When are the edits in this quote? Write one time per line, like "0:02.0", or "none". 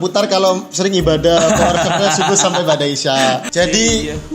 0:03.5